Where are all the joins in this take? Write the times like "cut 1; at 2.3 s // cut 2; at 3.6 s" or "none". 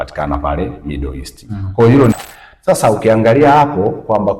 cut 1; at 2.1 s